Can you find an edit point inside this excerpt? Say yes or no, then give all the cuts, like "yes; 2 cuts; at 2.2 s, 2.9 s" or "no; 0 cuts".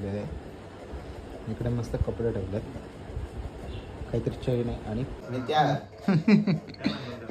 yes; 1 cut; at 5.2 s